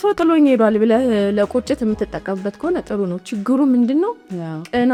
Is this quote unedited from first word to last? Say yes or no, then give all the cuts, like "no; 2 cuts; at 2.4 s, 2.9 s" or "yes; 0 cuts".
yes; 0 cuts